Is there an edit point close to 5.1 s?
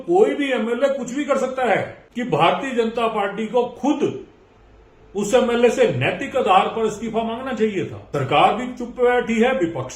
no; 2 cuts; at 2.0 s, 8.0 s

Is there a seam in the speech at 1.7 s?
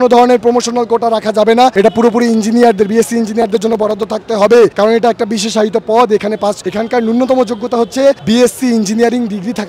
no; 0 cuts

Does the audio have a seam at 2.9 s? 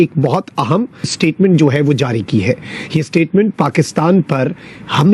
no; 1 cut; at 1.1 s

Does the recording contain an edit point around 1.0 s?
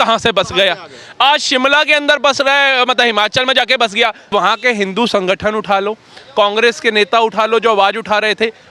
no; 1 cut; at 4.2 s

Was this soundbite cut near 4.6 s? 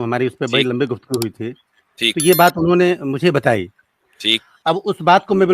yes; 1 cut; at 4.6 s

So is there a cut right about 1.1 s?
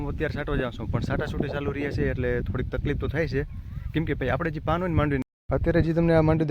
no; 1 cut; at 5.2 s

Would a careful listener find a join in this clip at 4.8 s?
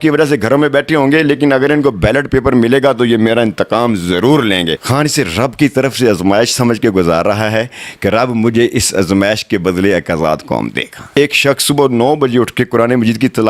yes; 2 cuts; at 4.8 s, 11.1 s

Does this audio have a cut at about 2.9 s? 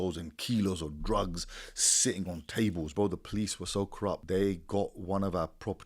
yes; 2 cuts; at 2.9 s, 4.2 s

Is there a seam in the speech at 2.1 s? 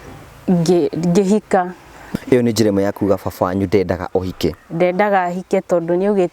yes; 1 cut; at 2.1 s

